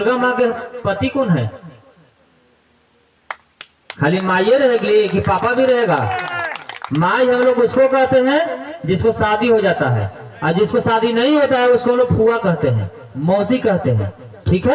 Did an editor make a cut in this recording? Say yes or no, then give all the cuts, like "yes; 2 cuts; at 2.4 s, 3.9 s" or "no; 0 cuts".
no; 0 cuts